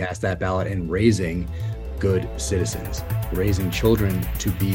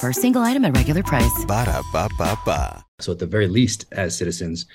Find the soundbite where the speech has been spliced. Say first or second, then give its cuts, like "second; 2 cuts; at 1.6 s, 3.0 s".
second; 1 cut; at 2.9 s